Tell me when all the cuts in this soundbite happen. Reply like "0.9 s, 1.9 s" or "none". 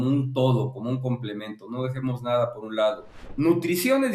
3.2 s